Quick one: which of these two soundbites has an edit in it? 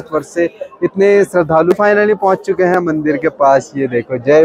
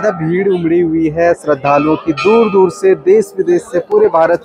first; 1 cut; at 1.7 s

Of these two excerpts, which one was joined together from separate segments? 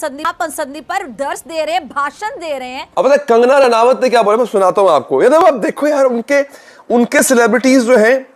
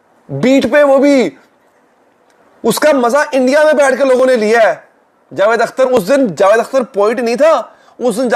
first; 1 cut; at 2.8 s

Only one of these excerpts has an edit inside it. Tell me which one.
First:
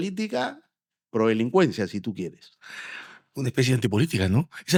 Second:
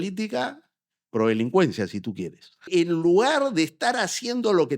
second; 1 cut; at 2.7 s

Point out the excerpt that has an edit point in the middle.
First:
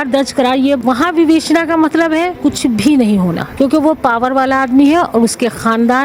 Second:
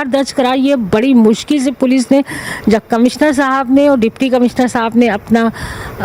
first; 3 cuts; at 0.8 s, 2.3 s, 3.5 s

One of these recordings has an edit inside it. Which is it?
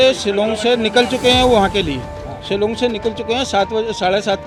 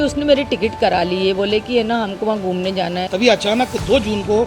second; 1 cut; at 3.0 s

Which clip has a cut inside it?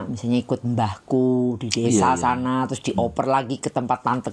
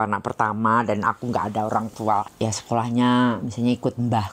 second; 1 cut; at 2.3 s

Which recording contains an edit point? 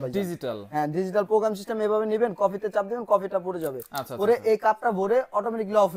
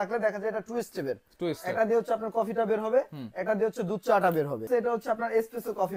second; 1 cut; at 4.7 s

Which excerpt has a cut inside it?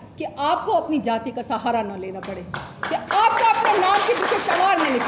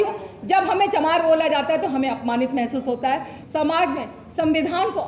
second; 1 cut; at 3.3 s

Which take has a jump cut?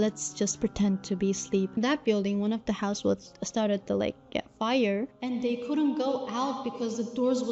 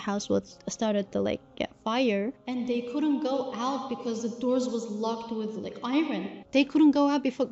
first; 1 cut; at 1.8 s

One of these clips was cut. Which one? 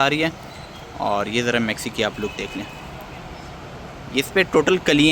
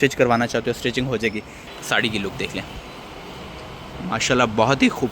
second; 1 cut; at 1.7 s

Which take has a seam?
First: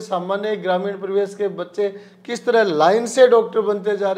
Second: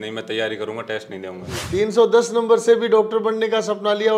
second; 1 cut; at 1.6 s

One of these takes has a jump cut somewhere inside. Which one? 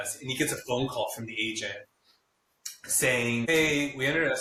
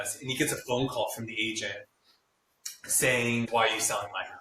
second; 1 cut; at 3.5 s

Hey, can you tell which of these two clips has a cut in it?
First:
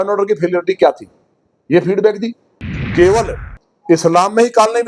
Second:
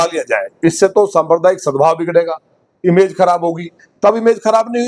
first; 1 cut; at 2.7 s

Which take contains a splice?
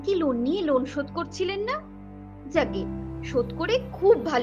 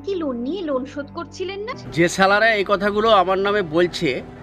second; 1 cut; at 1.8 s

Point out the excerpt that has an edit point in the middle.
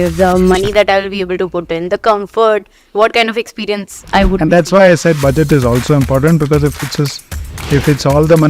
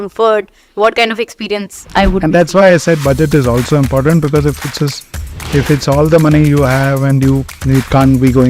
second; 1 cut; at 7.5 s

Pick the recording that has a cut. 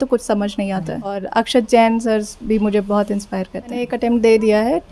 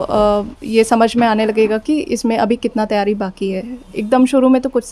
first; 2 cuts; at 1.2 s, 3.9 s

